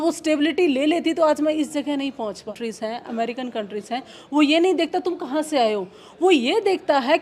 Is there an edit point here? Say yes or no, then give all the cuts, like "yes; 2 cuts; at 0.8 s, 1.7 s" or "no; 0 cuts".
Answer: yes; 1 cut; at 2.6 s